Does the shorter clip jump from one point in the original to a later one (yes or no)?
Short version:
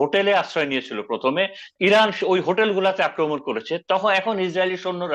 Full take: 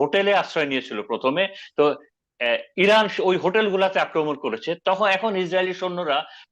yes